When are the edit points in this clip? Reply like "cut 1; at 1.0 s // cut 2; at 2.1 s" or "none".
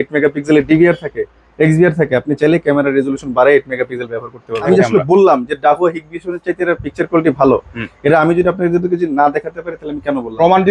cut 1; at 4.6 s